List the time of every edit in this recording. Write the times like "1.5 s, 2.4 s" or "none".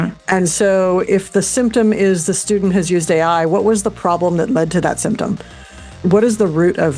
6.0 s